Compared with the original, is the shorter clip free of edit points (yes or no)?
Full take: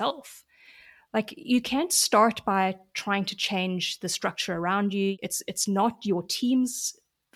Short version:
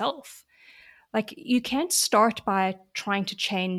yes